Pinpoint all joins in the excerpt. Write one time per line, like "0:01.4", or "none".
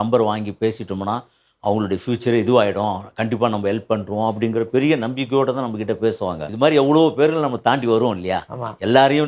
0:06.4